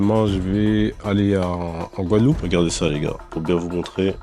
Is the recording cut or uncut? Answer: cut